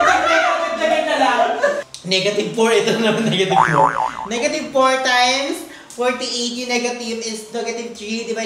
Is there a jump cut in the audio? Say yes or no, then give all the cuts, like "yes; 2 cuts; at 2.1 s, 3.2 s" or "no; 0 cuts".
yes; 1 cut; at 1.8 s